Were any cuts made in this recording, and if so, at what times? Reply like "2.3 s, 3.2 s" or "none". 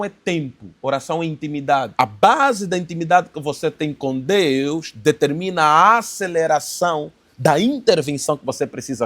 1.9 s